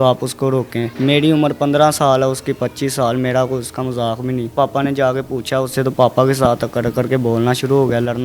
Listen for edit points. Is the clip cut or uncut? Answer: cut